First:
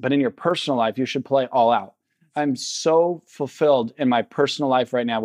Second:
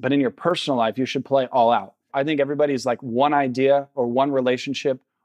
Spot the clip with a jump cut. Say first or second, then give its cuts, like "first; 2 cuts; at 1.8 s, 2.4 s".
second; 1 cut; at 2.1 s